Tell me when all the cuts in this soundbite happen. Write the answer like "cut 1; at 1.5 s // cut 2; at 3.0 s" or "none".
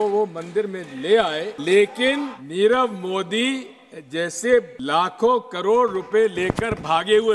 cut 1; at 1.5 s // cut 2; at 2.4 s // cut 3; at 4.8 s